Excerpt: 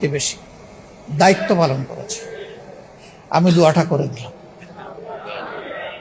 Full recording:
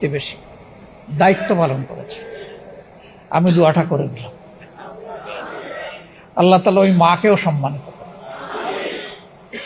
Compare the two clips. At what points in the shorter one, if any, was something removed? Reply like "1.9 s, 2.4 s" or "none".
none

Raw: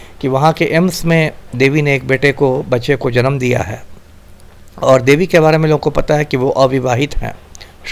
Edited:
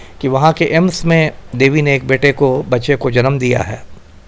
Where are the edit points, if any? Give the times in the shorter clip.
none

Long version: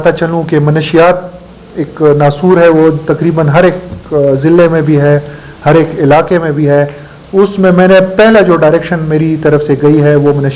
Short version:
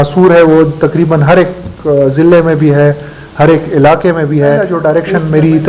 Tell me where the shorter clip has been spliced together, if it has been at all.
4.8 s

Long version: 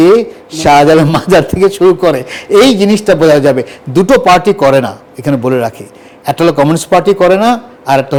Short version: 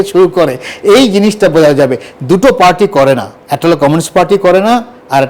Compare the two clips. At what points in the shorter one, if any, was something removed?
3.4 s

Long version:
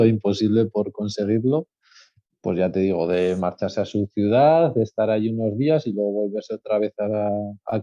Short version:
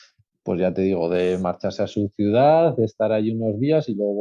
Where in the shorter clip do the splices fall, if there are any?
none

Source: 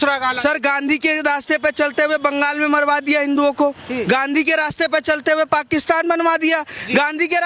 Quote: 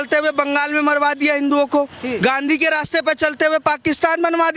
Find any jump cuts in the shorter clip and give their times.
none

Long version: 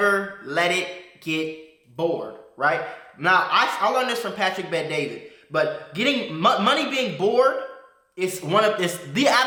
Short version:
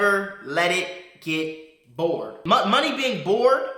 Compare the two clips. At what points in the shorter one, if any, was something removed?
2.4 s

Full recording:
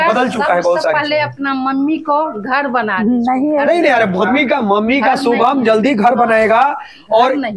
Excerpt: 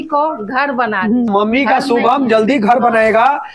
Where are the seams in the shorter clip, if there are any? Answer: 1.3 s

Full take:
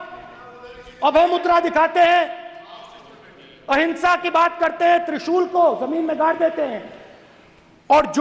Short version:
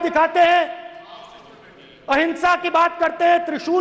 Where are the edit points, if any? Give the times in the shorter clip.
none

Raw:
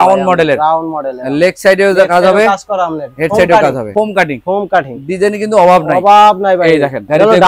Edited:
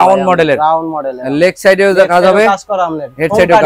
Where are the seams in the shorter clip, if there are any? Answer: none

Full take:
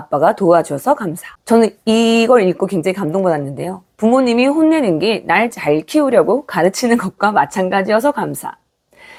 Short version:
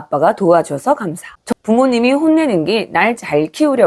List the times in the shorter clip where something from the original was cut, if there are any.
1.3 s

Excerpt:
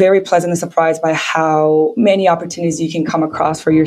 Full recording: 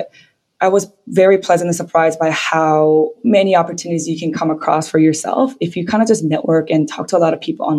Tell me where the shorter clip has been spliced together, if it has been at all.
1.9 s

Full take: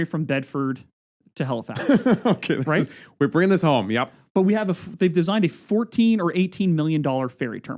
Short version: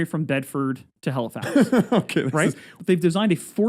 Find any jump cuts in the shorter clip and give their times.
0.9 s, 2.7 s

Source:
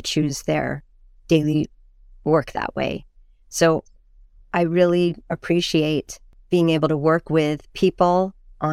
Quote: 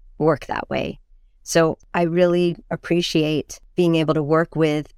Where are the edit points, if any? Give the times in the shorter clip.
1.8 s, 3.6 s

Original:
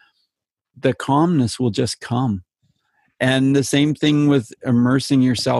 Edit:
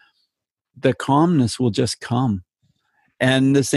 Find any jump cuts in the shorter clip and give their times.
none

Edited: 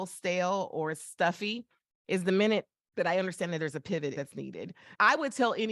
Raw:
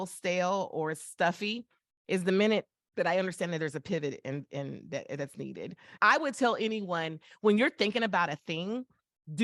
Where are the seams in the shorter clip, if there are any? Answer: 4.2 s

